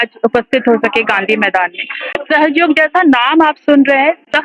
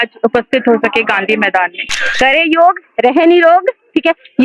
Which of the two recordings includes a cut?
second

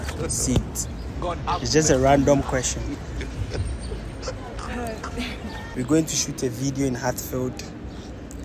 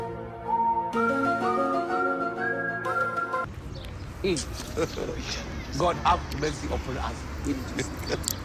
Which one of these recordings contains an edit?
first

